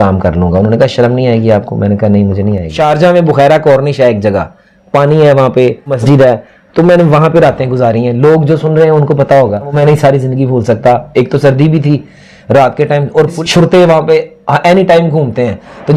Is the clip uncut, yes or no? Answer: no